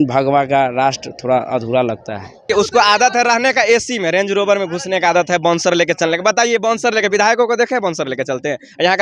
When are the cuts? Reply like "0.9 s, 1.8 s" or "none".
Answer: 2.5 s